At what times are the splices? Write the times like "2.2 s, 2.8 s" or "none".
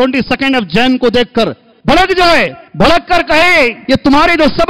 1.7 s, 2.6 s, 3.8 s